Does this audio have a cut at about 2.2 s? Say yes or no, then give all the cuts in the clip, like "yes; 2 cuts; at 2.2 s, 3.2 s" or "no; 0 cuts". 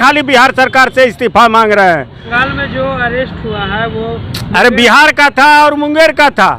yes; 1 cut; at 2.2 s